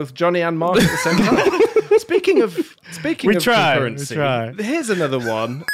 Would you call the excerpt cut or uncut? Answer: uncut